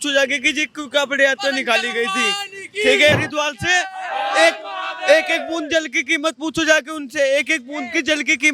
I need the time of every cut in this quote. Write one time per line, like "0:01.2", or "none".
0:03.1